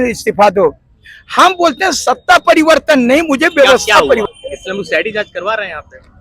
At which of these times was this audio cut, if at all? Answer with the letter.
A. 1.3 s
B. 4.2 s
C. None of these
B